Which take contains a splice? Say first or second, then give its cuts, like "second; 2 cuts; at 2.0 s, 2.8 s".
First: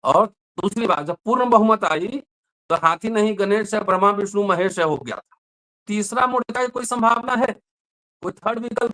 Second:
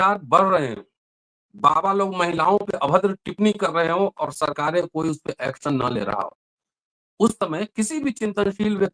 first; 1 cut; at 5.8 s